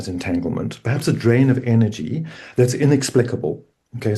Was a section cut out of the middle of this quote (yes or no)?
no